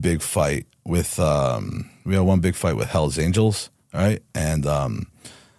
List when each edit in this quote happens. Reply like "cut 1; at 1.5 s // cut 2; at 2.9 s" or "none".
none